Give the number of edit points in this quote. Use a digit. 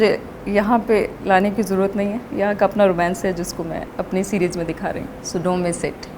2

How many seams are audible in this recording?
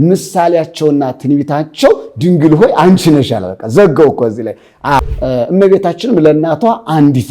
1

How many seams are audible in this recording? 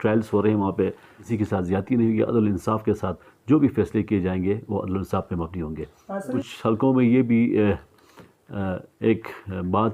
2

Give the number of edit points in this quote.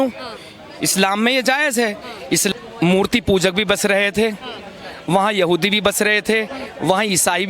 1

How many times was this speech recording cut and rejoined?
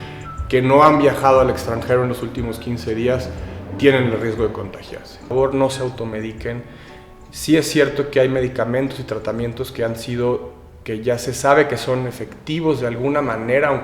1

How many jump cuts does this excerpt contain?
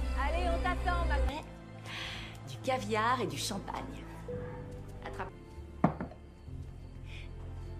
1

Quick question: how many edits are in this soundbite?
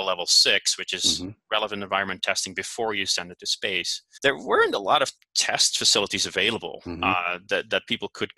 2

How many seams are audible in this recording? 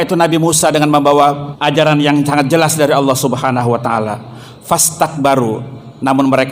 1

